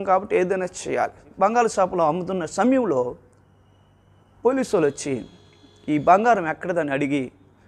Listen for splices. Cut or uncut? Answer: cut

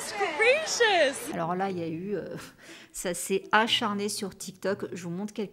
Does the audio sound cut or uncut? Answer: uncut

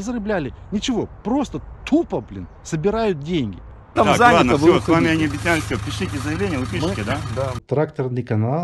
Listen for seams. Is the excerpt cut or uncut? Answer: cut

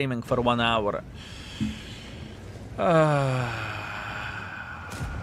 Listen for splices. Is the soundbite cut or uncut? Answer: uncut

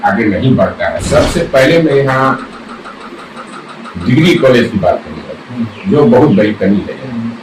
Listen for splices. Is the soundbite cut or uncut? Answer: cut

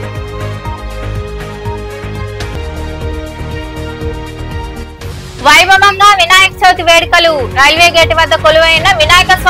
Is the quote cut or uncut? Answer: cut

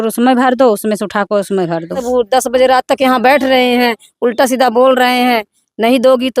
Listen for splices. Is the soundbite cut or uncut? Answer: cut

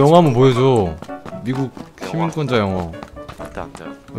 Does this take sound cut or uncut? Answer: uncut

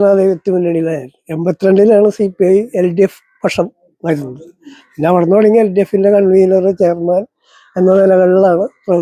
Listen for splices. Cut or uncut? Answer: uncut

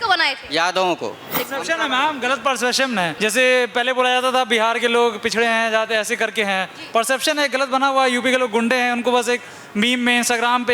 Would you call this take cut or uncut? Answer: cut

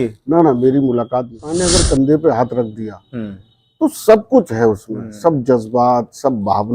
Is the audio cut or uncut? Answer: cut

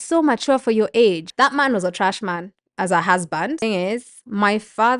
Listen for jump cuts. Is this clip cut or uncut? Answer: cut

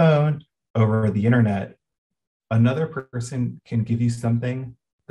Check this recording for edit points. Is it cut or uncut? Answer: uncut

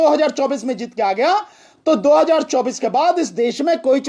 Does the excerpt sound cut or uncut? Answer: uncut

